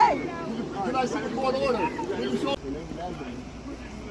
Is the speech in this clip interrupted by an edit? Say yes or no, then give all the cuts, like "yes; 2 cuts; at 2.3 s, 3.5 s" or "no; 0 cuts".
yes; 1 cut; at 2.6 s